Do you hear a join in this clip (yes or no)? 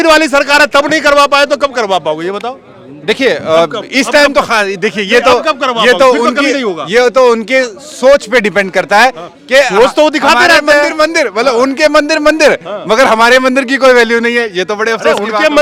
no